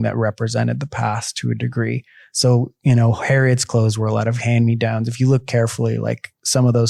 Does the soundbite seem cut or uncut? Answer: uncut